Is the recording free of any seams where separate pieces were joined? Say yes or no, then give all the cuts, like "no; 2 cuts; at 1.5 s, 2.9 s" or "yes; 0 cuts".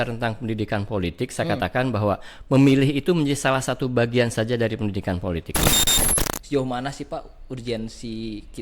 no; 1 cut; at 5.8 s